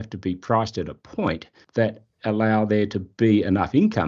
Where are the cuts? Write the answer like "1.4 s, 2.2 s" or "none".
1.5 s